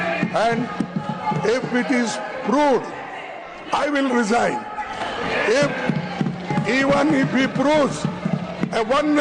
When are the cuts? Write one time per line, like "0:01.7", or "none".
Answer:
none